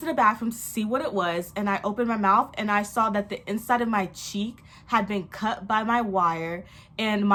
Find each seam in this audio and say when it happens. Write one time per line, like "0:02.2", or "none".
none

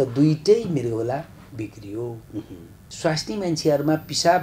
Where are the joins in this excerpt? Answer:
0:02.9

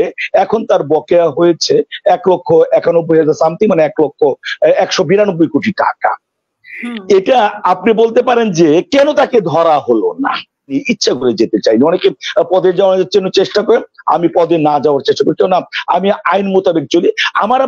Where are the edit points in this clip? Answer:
0:10.8

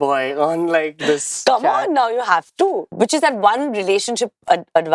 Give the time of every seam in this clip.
0:02.9

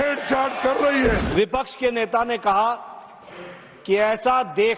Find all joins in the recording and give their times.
0:01.2

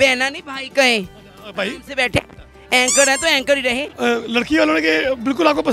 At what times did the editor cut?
0:03.9

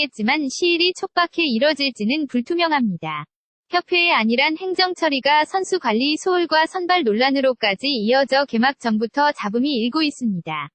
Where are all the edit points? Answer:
none

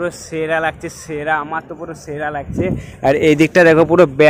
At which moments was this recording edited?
none

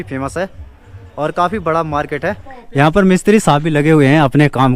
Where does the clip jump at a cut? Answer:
0:02.5

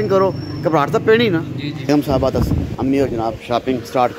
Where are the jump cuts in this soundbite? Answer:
0:01.9

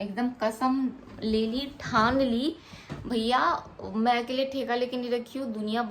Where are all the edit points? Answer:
none

